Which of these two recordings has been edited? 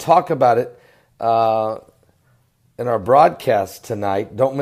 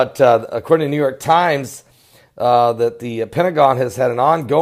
first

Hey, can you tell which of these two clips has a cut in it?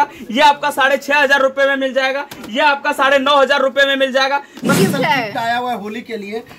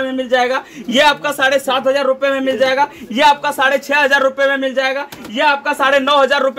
first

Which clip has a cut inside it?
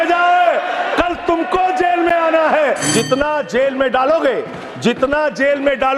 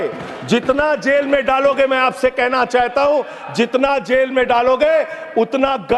first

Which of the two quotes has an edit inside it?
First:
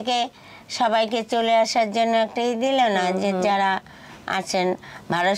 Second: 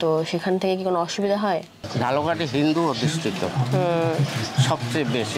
second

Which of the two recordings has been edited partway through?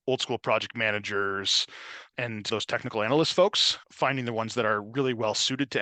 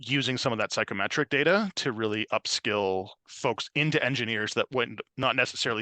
second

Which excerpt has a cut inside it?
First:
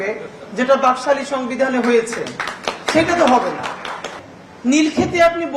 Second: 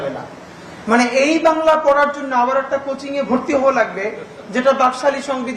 first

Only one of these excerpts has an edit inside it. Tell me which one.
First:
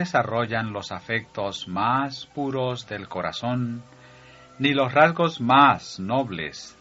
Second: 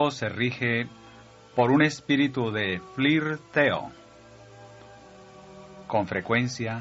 second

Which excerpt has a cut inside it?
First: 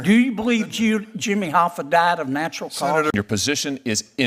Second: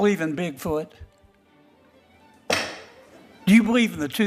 first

